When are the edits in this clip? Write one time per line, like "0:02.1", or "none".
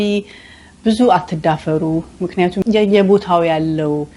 0:02.6